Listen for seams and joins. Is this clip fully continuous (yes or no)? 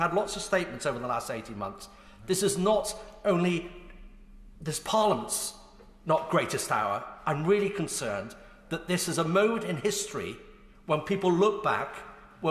yes